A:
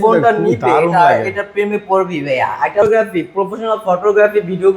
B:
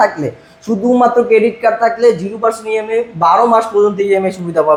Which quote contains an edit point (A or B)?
A